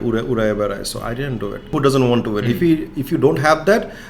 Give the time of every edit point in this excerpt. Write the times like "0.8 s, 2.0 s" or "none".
1.7 s